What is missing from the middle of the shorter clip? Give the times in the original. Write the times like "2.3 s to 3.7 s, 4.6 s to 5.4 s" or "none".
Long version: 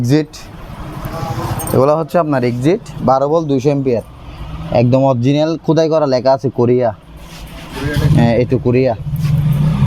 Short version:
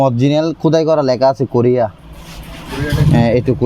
none